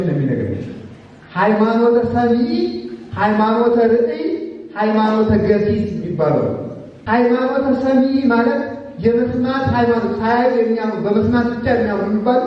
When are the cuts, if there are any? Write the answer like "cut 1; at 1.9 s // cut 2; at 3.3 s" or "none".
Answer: cut 1; at 7.1 s